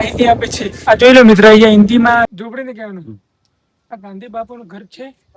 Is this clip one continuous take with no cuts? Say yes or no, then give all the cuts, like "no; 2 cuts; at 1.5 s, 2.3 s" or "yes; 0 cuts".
no; 1 cut; at 2.4 s